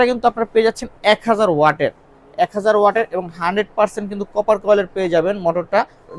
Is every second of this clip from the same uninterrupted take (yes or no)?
yes